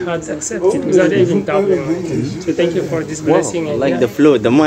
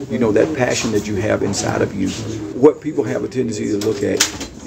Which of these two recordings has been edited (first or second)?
second